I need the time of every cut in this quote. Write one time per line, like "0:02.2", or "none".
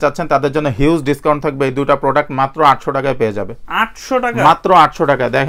none